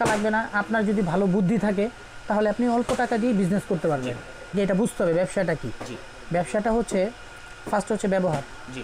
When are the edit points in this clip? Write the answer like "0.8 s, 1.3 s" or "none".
4.5 s